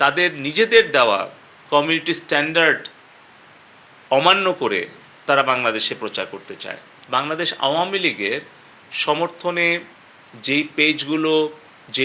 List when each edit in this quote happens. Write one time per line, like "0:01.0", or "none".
0:06.9